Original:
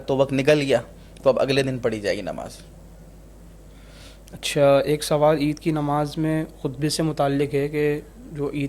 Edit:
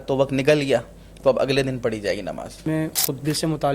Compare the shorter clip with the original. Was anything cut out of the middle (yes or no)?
yes